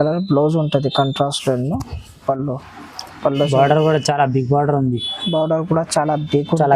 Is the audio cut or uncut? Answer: cut